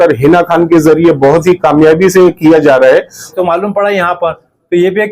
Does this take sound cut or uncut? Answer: cut